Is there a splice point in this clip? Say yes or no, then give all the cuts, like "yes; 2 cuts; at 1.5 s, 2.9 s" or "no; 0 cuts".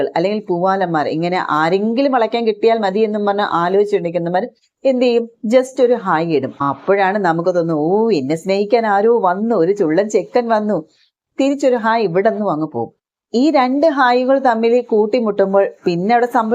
no; 0 cuts